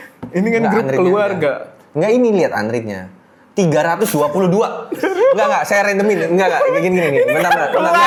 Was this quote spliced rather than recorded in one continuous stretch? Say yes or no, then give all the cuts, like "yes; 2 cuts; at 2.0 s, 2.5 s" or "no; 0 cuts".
no; 0 cuts